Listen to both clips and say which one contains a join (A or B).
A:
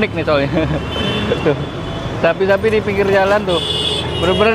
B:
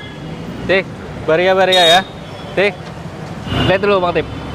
B